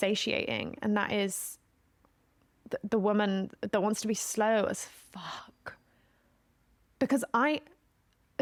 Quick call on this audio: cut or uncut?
uncut